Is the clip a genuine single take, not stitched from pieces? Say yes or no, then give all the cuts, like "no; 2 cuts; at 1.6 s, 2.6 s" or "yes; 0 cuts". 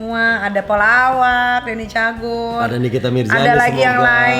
yes; 0 cuts